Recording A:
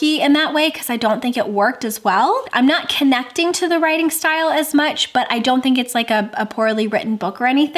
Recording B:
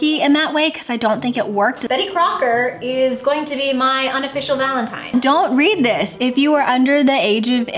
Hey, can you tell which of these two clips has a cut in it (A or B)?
B